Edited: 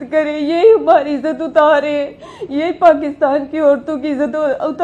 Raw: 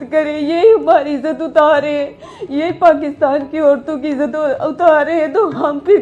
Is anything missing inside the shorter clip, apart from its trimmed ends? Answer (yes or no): no